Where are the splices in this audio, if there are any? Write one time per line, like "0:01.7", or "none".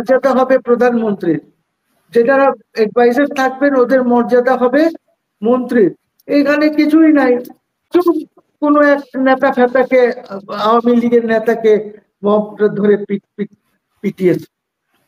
0:07.8